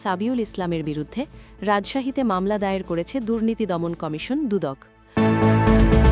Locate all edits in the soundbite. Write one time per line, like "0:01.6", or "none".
0:05.0